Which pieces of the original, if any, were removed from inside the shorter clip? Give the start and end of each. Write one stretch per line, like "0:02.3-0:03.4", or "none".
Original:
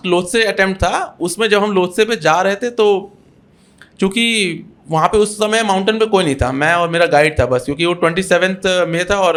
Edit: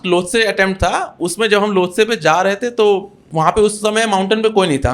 0:03.2-0:04.7